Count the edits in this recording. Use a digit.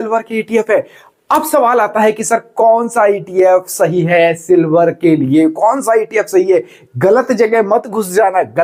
0